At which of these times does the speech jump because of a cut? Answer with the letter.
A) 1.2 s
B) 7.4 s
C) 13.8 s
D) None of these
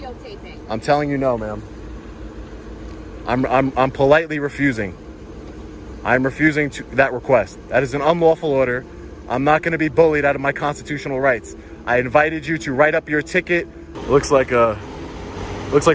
C